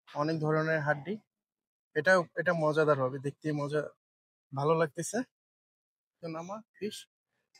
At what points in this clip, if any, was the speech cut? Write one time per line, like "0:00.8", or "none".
0:06.2